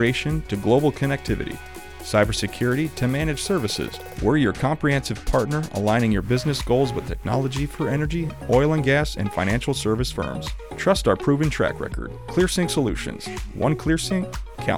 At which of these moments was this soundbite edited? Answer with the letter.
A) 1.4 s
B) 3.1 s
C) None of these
C